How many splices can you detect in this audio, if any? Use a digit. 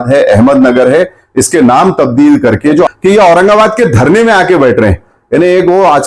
1